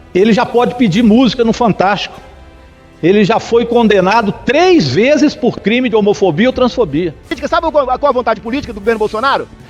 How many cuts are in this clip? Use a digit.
1